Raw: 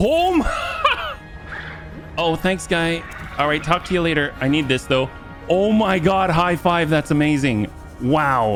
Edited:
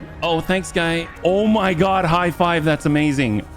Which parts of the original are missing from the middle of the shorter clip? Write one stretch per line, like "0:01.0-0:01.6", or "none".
0:03.0-0:05.3